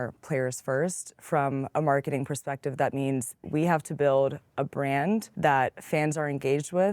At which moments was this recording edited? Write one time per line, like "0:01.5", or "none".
0:03.4
0:05.3